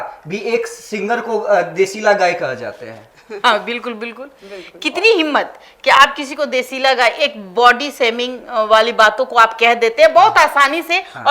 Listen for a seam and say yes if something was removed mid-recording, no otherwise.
no